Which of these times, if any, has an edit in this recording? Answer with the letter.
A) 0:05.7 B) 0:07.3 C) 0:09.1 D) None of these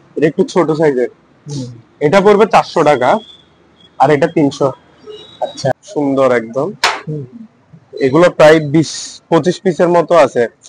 A